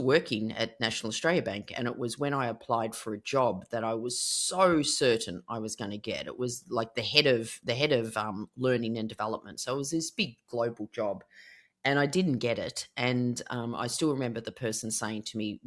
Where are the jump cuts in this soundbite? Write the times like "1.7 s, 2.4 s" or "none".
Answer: none